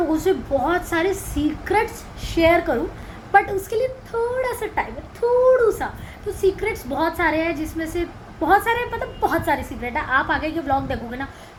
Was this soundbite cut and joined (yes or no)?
no